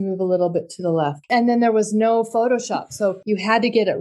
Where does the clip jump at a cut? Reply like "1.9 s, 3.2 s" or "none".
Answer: 1.2 s, 3.2 s